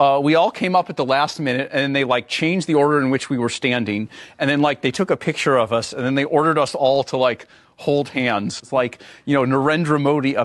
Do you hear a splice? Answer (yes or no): yes